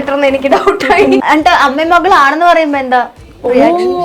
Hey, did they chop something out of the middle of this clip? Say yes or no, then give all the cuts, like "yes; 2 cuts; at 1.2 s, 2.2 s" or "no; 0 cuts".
yes; 1 cut; at 1.2 s